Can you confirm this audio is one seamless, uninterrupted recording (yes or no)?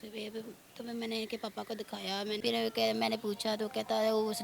no